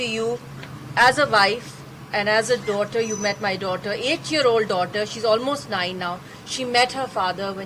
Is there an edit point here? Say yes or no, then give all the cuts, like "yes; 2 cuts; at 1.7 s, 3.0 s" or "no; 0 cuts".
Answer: no; 0 cuts